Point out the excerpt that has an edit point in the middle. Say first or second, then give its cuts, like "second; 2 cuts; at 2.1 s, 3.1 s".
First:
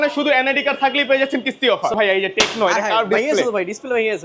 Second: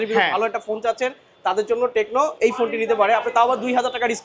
first; 1 cut; at 2.0 s